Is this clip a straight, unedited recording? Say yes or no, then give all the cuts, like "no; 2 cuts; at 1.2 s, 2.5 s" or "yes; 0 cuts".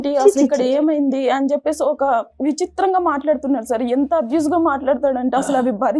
yes; 0 cuts